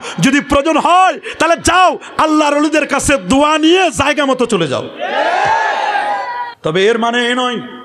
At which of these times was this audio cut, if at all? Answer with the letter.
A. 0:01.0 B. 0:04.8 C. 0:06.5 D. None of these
C